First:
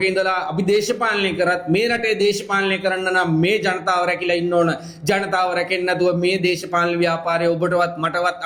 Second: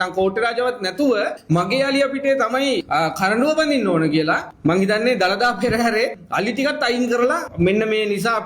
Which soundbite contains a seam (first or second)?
second